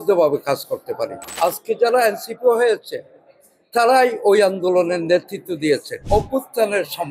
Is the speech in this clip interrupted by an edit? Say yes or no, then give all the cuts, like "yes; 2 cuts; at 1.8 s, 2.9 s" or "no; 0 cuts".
yes; 2 cuts; at 1.2 s, 5.9 s